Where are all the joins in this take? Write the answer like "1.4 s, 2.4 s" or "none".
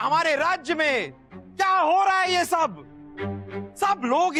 none